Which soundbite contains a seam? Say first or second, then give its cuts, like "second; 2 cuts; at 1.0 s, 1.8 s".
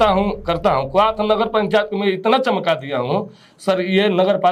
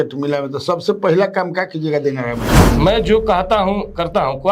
second; 1 cut; at 2.5 s